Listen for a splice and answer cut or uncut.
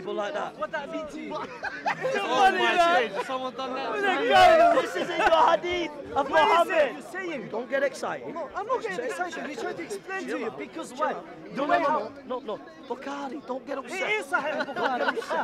cut